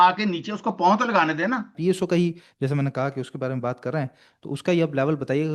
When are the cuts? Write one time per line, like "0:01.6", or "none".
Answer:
0:01.7